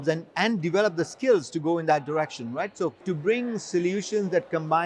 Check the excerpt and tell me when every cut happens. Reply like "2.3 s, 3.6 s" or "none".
3.0 s